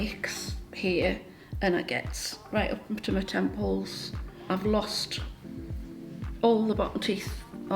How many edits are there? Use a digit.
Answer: 1